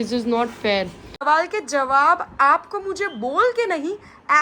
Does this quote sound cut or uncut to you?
cut